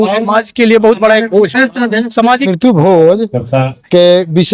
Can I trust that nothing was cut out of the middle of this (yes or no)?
no